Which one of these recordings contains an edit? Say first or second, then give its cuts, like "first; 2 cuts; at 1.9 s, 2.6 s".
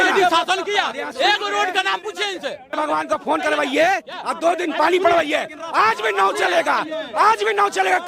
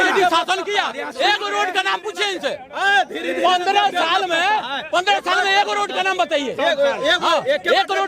first; 1 cut; at 2.7 s